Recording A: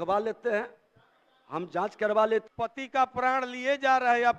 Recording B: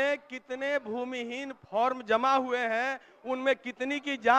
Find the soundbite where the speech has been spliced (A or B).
A